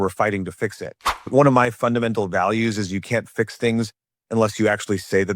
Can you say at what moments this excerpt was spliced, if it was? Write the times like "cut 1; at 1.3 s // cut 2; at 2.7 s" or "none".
cut 1; at 1.3 s